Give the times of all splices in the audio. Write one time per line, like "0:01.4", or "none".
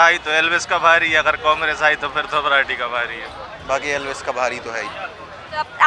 none